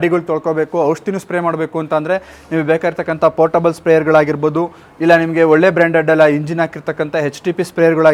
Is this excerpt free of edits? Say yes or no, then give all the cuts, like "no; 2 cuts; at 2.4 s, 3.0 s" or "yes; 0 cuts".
yes; 0 cuts